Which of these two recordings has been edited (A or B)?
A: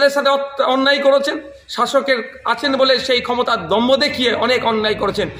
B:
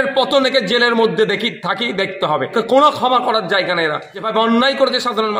B